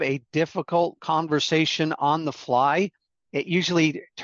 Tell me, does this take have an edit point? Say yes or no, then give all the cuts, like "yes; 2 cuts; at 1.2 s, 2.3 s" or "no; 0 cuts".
yes; 1 cut; at 1.0 s